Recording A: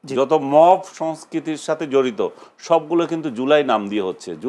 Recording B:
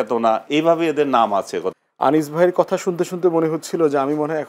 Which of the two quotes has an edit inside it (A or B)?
B